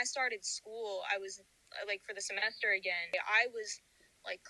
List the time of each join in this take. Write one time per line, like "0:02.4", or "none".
0:03.1